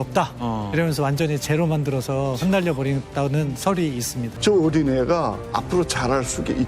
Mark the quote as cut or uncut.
cut